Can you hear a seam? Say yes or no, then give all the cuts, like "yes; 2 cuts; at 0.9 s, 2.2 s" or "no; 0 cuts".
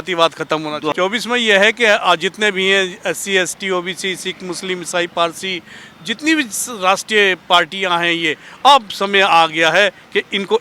yes; 1 cut; at 0.9 s